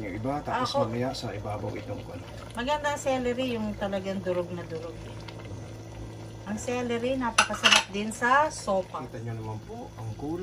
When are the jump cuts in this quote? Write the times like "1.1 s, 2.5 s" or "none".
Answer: 9.0 s